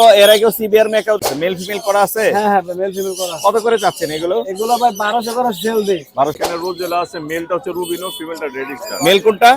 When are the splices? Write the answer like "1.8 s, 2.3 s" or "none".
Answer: 1.3 s, 6.4 s

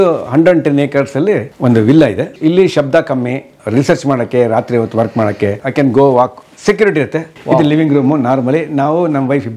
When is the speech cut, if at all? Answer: 1.5 s, 2.3 s, 5.6 s, 7.3 s

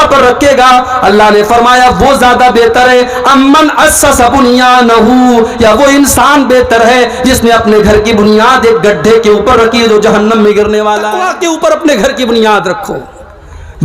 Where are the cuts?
11.2 s

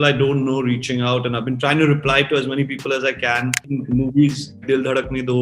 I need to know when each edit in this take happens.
3.6 s

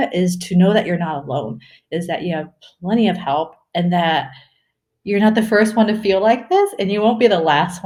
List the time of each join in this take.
none

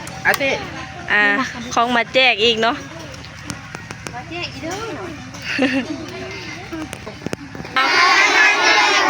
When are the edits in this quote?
7.0 s

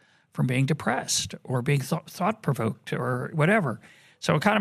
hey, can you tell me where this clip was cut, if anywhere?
none

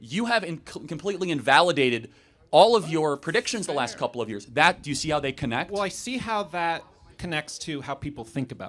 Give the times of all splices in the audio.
none

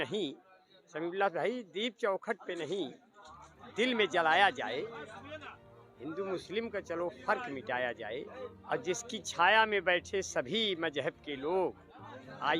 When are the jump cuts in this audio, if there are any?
none

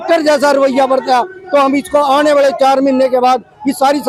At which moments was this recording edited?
none

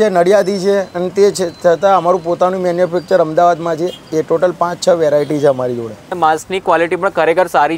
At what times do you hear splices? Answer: 6.1 s

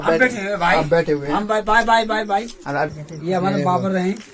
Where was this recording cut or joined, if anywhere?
2.9 s

